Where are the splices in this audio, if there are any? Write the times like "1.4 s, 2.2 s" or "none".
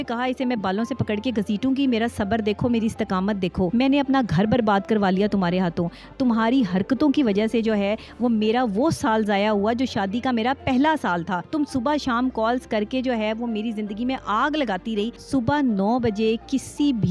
3.7 s, 11.4 s, 15.2 s

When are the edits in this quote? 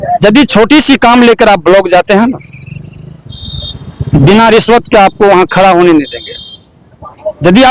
none

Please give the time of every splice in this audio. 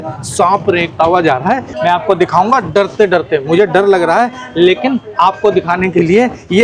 1.7 s

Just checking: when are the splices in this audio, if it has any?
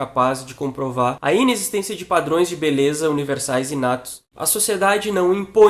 1.2 s, 4.3 s

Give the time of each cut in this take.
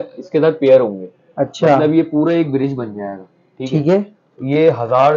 none

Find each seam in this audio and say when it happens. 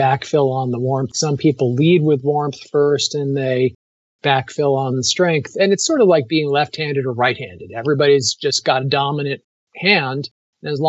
1.1 s

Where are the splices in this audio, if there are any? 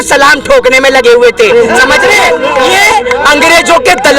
2.4 s

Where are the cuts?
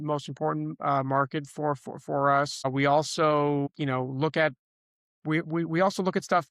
2.6 s, 3.7 s

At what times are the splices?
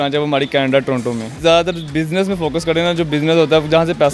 1.3 s

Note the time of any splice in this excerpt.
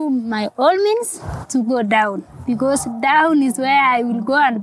none

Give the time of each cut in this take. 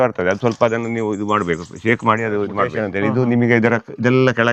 2.8 s

